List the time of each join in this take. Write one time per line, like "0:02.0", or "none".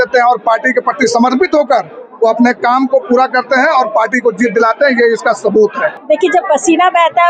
0:05.9